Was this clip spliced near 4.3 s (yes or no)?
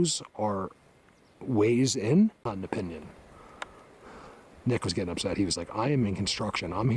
no